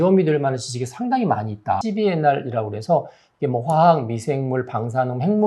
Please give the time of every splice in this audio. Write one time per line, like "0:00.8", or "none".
0:01.8